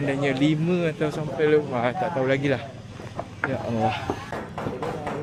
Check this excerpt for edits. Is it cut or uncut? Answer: uncut